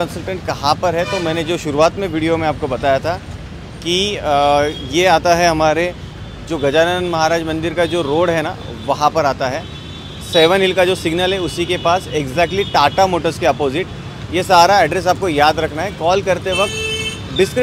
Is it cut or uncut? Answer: uncut